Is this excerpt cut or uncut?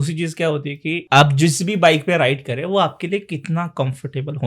cut